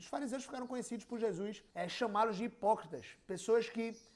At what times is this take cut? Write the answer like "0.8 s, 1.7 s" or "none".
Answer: 1.6 s